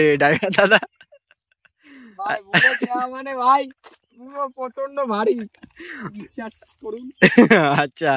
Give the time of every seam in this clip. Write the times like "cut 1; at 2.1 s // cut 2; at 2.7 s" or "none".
none